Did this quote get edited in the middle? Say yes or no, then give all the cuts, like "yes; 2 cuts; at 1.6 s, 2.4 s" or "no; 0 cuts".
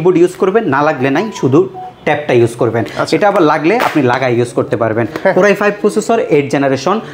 no; 0 cuts